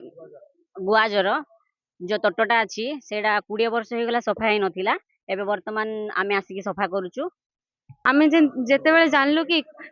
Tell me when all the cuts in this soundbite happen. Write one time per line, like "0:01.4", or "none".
0:07.9